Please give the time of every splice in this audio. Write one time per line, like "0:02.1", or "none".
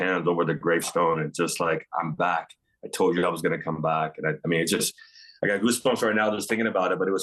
none